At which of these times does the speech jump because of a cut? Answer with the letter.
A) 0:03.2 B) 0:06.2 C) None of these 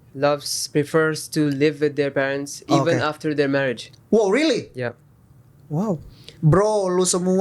B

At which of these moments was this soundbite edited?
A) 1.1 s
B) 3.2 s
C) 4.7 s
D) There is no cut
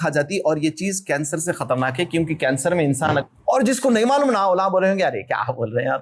B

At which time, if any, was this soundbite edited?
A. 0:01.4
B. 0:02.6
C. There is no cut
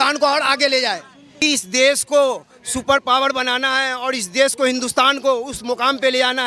A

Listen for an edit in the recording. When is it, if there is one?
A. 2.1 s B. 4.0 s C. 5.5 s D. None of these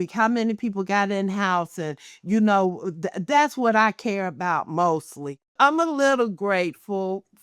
C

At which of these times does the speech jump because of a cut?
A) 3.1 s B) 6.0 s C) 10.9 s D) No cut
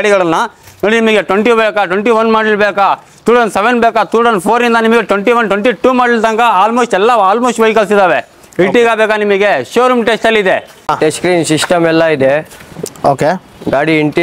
C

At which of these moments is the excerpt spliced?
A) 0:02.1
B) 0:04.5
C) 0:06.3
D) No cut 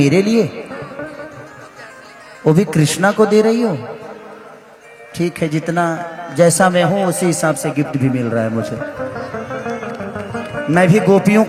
D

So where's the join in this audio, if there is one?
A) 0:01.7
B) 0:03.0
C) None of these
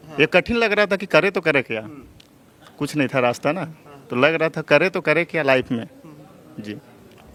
C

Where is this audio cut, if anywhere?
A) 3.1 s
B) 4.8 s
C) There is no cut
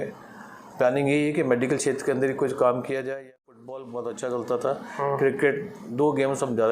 A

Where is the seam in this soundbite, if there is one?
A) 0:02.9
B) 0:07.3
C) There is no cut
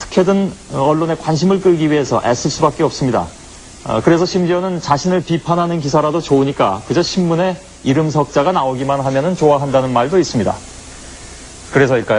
A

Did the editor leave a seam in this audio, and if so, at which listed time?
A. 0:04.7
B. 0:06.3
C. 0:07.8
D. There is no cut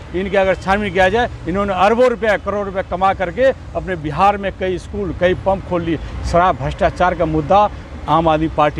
D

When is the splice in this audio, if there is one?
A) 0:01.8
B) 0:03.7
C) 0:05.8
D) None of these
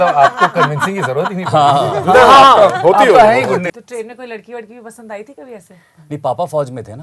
B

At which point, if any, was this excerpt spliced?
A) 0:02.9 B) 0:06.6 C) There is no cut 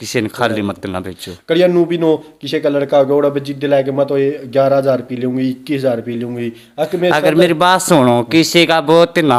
C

